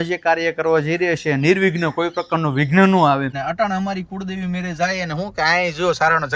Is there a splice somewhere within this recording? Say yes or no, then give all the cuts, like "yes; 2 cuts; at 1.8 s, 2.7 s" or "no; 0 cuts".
yes; 1 cut; at 3.3 s